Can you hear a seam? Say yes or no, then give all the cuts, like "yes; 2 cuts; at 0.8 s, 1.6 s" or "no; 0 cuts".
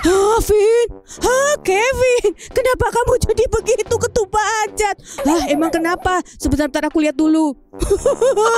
yes; 1 cut; at 7.7 s